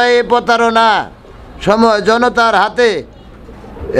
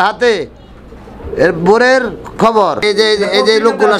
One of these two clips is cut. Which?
second; 1 cut; at 2.8 s

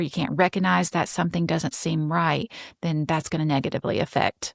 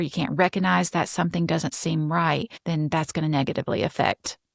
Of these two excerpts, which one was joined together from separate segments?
second; 1 cut; at 2.5 s

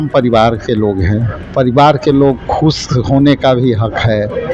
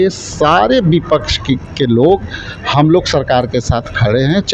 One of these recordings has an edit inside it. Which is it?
first; 1 cut; at 1.4 s

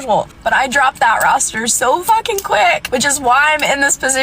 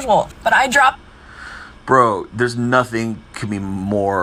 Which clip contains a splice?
first; 1 cut; at 1.0 s

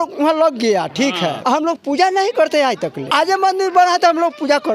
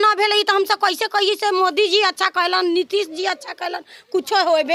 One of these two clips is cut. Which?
first; 2 cuts; at 1.4 s, 3.0 s

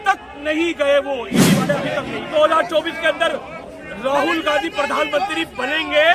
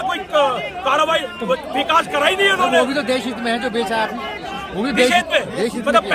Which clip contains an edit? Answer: first; 1 cut; at 2.3 s

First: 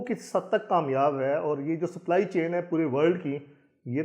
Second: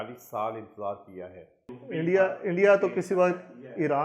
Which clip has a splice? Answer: second; 1 cut; at 1.8 s

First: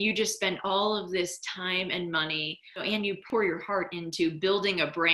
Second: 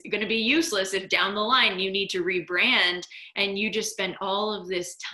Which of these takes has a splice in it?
first; 1 cut; at 2.9 s

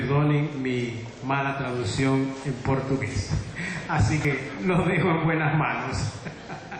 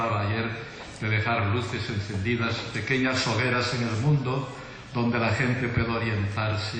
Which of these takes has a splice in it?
second; 1 cut; at 1.5 s

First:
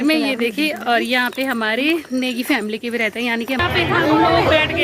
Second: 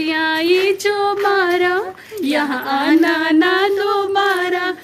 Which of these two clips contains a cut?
first; 1 cut; at 3.6 s

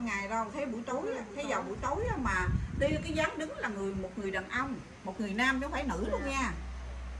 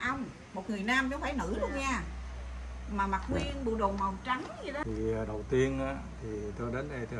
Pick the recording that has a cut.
second; 1 cut; at 4.8 s

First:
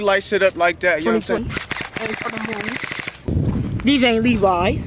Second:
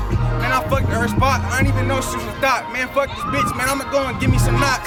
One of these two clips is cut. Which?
first; 2 cuts; at 1.4 s, 3.3 s

